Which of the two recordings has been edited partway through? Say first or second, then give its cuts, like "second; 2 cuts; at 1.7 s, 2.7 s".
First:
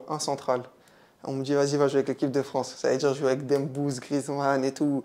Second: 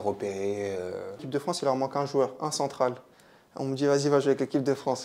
second; 1 cut; at 1.2 s